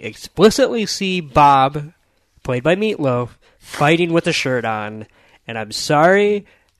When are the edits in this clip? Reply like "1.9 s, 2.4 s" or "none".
none